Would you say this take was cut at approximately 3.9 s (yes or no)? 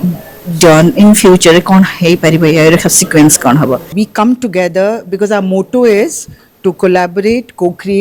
yes